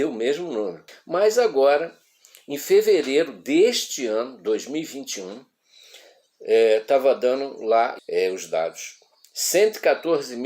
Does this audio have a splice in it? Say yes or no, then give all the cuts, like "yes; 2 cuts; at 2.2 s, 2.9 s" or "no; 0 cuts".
yes; 2 cuts; at 0.9 s, 8.0 s